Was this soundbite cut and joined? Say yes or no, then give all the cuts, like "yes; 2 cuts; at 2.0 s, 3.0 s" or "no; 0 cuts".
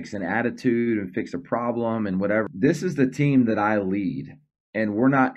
yes; 1 cut; at 2.5 s